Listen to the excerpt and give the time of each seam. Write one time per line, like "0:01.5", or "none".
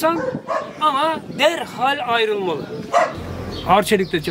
none